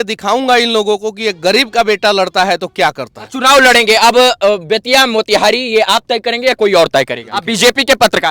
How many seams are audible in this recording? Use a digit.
2